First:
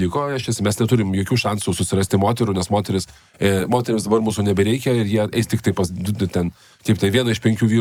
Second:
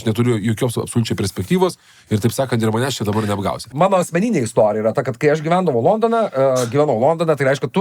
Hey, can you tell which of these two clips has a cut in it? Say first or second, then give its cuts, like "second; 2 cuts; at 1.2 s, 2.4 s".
second; 1 cut; at 3.7 s